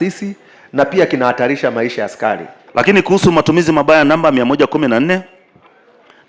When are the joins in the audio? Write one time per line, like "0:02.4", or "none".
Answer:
0:02.5

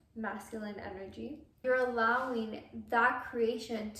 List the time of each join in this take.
0:01.6

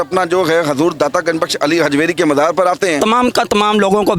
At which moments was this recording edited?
0:03.0

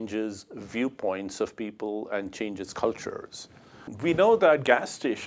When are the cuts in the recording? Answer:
0:03.9

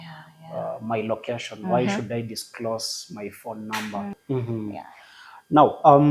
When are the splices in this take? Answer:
0:04.2

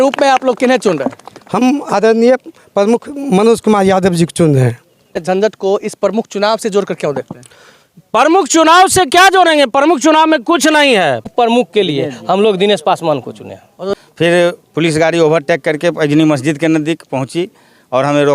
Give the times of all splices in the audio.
0:05.2
0:11.3
0:13.9

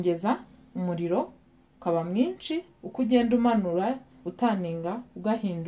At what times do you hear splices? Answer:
none

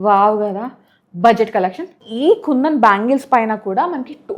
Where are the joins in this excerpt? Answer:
0:02.0

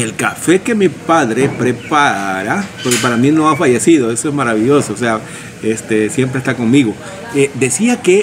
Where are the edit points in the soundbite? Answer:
none

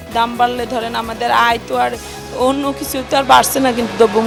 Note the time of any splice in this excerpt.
none

